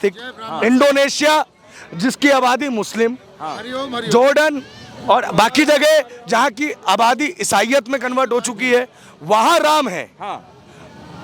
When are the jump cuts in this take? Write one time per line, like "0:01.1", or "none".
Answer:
none